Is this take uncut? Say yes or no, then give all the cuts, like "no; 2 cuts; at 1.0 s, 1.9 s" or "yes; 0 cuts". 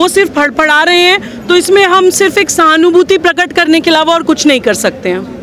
yes; 0 cuts